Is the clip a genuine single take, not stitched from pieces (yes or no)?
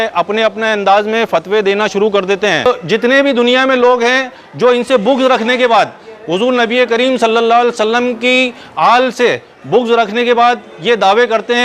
no